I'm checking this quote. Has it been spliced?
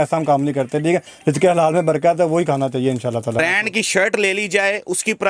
yes; 1 cut; at 3.4 s

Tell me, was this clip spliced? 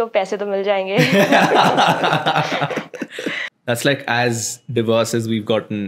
yes; 1 cut; at 3.5 s

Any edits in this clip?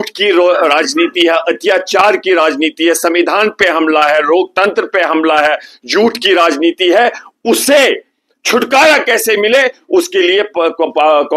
no; 0 cuts

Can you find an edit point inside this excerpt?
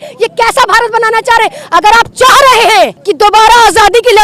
yes; 1 cut; at 3.0 s

